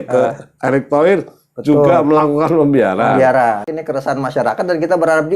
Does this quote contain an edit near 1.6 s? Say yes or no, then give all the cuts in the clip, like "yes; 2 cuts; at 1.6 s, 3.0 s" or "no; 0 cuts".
no; 1 cut; at 3.7 s